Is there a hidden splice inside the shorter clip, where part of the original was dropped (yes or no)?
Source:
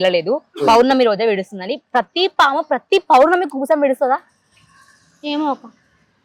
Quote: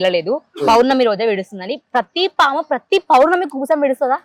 no